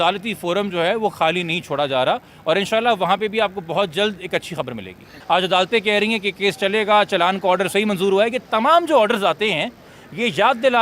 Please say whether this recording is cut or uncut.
cut